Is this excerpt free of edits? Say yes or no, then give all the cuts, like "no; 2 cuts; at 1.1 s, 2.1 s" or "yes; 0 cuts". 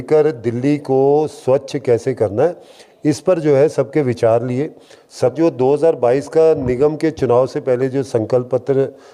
no; 1 cut; at 5.3 s